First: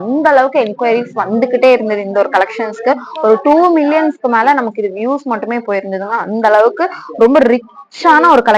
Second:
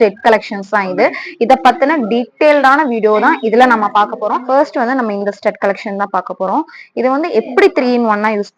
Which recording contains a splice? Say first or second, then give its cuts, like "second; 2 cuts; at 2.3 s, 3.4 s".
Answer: second; 1 cut; at 4.2 s